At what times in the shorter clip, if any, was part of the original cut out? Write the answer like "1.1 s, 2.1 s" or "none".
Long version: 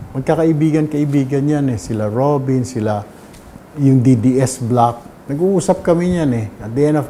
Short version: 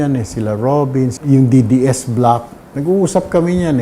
1.2 s